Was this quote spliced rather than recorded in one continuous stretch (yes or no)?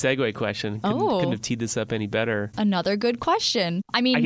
yes